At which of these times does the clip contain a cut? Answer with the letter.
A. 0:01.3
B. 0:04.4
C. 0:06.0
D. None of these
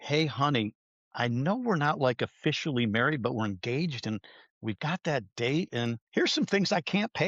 C